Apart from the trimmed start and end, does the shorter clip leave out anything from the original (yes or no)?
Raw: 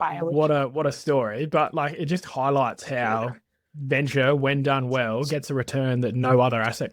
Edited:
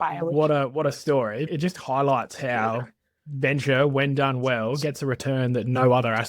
yes